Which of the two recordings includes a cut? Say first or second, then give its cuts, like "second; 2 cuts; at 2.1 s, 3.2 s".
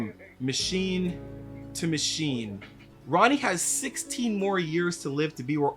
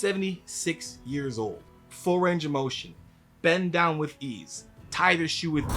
second; 1 cut; at 1.6 s